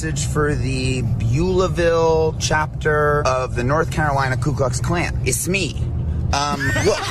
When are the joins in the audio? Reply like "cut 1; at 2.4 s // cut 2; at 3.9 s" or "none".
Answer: cut 1; at 3.2 s // cut 2; at 5.2 s